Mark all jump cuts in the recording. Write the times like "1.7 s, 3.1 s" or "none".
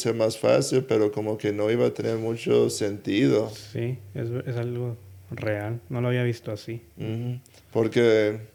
none